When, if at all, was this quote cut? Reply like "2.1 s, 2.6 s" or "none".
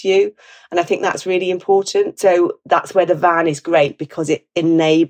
2.1 s